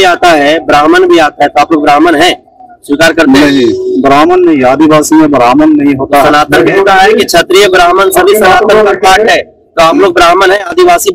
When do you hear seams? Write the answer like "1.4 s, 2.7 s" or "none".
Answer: none